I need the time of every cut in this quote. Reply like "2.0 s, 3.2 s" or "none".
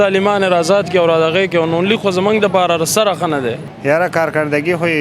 3.6 s